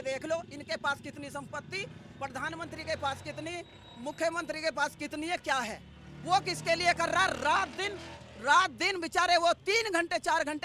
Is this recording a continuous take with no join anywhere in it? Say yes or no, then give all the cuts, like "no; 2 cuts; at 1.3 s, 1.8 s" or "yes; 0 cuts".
yes; 0 cuts